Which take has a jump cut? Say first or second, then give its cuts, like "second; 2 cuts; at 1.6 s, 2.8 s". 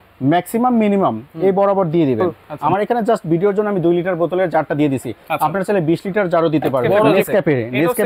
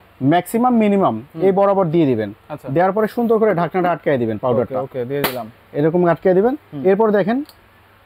first; 2 cuts; at 2.5 s, 7.0 s